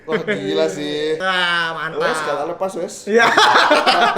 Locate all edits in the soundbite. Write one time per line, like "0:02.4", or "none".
0:01.3